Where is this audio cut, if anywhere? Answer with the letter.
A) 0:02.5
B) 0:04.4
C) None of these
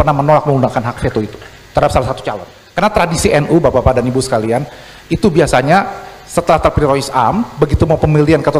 A